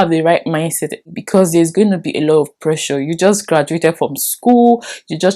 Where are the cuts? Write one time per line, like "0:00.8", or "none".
0:01.0